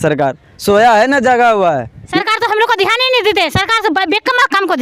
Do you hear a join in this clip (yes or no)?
yes